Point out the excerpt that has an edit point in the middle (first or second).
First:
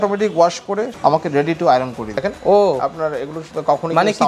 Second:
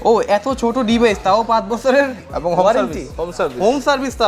first